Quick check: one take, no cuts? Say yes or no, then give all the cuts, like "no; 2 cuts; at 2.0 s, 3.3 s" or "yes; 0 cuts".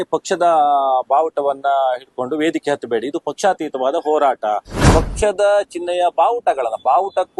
no; 1 cut; at 4.7 s